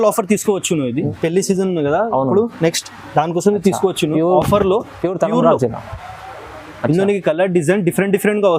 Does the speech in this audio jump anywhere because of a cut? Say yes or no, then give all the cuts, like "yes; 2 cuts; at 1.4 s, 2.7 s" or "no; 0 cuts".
yes; 1 cut; at 1.1 s